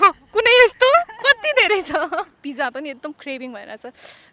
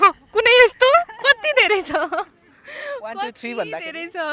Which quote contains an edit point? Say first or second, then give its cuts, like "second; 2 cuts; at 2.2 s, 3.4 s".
first; 1 cut; at 2.4 s